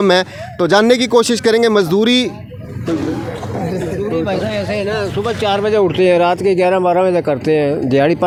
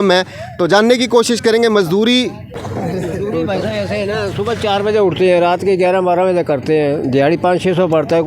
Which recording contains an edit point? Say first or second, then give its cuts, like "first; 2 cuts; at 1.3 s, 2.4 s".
second; 1 cut; at 2.6 s